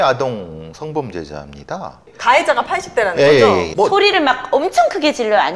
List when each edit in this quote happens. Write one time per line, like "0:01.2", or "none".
0:02.0
0:03.7